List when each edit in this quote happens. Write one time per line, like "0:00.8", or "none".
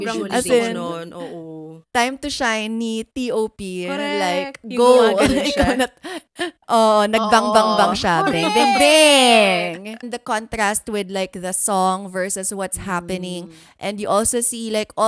0:01.8
0:10.1